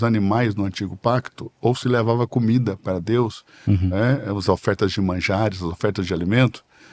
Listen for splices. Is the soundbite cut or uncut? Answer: uncut